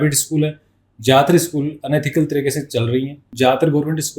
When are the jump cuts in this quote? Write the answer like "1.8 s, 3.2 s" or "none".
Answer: 3.2 s